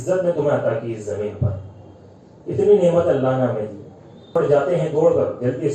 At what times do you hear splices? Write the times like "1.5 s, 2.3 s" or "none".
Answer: 4.3 s

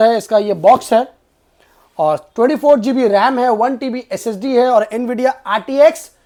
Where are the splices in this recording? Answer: none

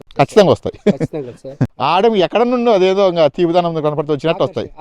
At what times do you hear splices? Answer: 1.6 s

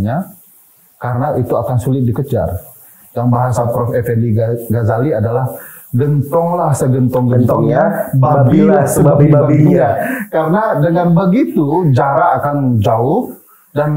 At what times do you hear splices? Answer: none

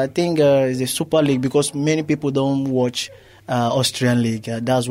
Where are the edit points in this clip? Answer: none

